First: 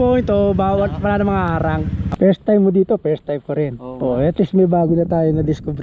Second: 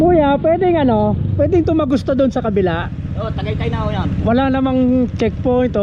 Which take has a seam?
first; 1 cut; at 2.0 s

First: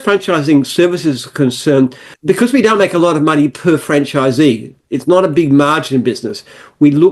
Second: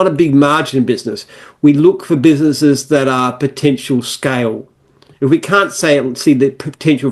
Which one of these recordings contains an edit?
first; 1 cut; at 2.1 s

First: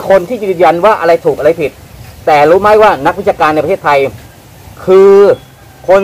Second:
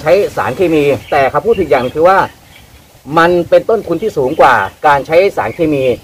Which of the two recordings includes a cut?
second; 1 cut; at 1.0 s

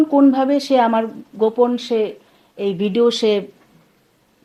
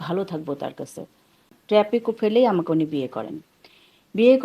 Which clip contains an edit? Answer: second; 1 cut; at 1.5 s

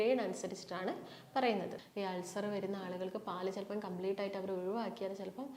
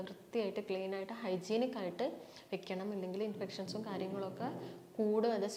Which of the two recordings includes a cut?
first; 1 cut; at 1.8 s

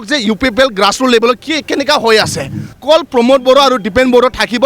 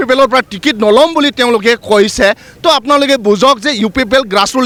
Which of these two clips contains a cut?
first; 1 cut; at 2.7 s

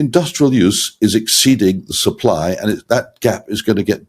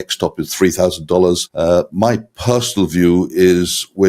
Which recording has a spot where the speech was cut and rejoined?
second; 1 cut; at 1.8 s

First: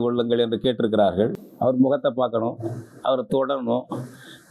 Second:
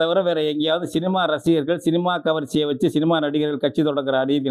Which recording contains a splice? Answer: first; 1 cut; at 1.4 s

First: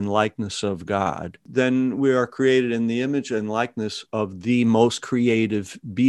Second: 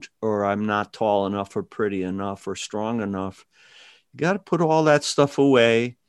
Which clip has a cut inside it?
first; 1 cut; at 1.4 s

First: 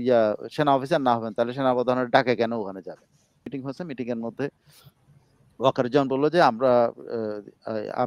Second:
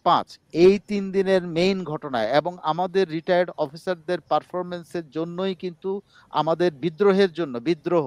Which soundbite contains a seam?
first; 1 cut; at 3.5 s

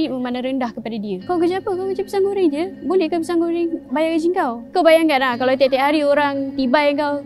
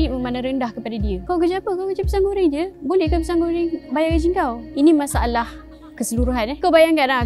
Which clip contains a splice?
first; 1 cut; at 4.7 s

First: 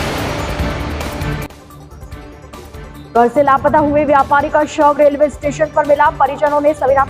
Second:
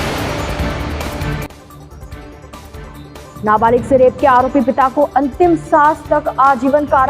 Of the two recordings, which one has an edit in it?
second; 2 cuts; at 2.5 s, 3.4 s

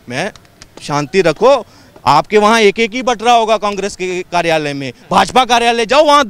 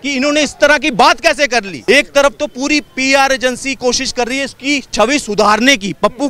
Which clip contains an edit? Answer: second; 1 cut; at 1.7 s

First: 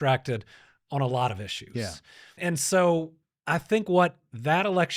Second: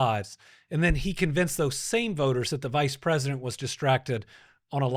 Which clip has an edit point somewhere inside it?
first; 1 cut; at 2.4 s

